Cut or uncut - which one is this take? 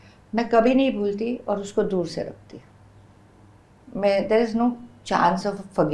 uncut